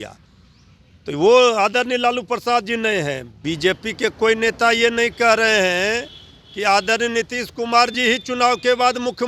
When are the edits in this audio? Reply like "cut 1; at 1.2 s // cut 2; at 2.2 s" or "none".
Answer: cut 1; at 3.3 s